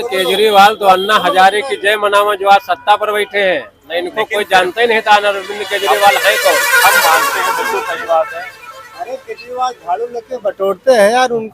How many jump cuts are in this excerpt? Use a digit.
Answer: 0